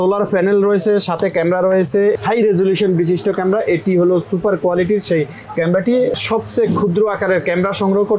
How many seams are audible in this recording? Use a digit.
2